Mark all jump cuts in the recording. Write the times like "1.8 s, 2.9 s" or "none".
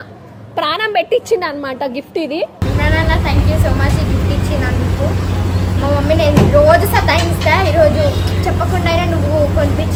none

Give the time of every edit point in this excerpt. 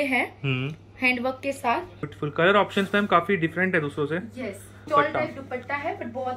2.1 s, 4.8 s

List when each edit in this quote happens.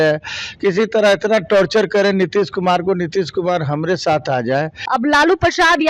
4.8 s

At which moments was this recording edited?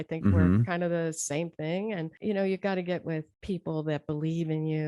2.1 s, 3.3 s

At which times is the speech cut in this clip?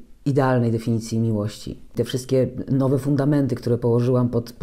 1.9 s

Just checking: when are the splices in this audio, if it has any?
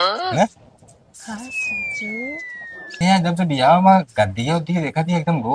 2.9 s

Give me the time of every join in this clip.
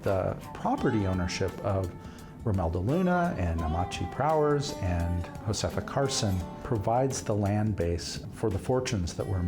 5.3 s, 6.5 s, 8.2 s

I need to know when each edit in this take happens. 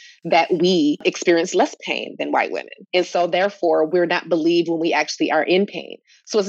1.0 s

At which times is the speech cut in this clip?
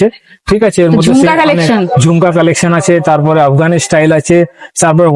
none

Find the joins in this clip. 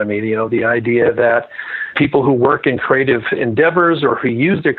1.9 s

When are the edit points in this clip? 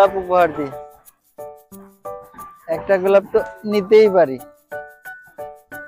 0.7 s, 2.7 s, 4.5 s

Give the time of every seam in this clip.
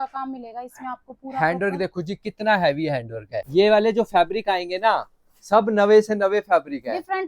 3.5 s

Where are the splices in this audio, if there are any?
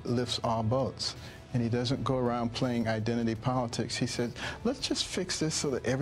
none

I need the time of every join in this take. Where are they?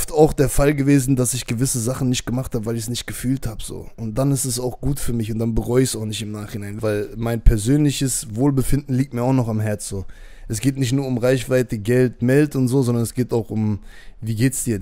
none

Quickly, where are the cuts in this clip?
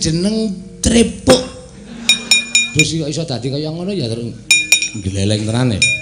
2.6 s

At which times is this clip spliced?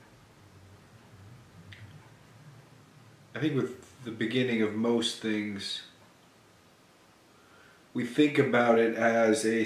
4.1 s

